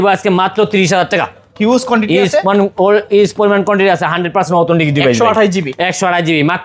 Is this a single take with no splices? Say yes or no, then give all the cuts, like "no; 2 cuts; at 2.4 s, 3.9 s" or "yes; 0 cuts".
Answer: yes; 0 cuts